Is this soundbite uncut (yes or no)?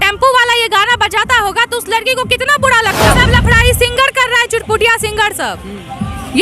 no